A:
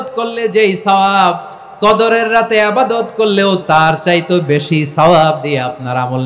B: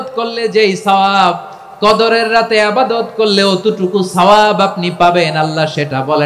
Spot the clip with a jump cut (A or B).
A